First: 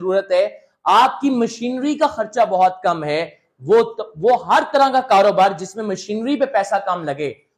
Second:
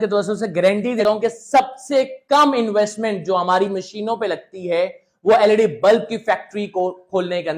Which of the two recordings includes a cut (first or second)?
second